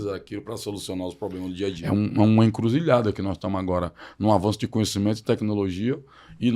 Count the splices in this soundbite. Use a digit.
1